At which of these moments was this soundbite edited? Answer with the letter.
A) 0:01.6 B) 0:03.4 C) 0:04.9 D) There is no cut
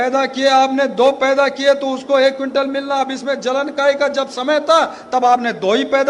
D